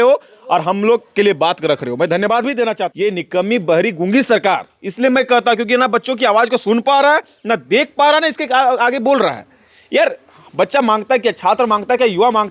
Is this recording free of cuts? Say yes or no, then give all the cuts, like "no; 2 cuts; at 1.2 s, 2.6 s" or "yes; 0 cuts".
no; 1 cut; at 2.9 s